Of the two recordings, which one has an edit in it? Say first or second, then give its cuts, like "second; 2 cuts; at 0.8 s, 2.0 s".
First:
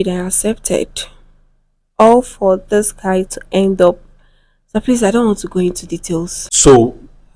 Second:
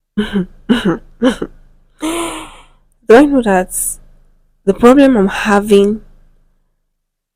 first; 1 cut; at 6.4 s